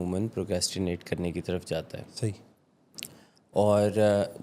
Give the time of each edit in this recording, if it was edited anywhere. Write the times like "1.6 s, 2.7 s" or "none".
none